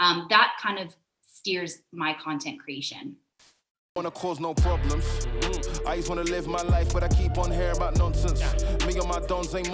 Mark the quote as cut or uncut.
cut